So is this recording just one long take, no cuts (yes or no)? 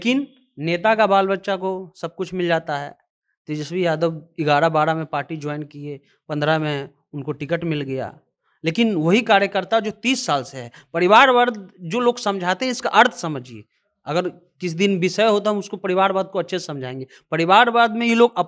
yes